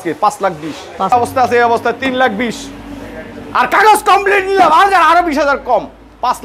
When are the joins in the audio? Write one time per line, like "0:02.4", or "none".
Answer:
0:01.1